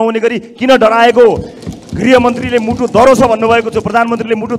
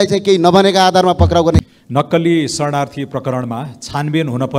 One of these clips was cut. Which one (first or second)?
second